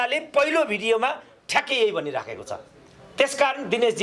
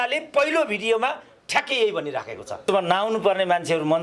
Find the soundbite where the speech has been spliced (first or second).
second